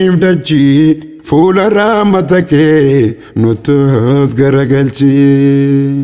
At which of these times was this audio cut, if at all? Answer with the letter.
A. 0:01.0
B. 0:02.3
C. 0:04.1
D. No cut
A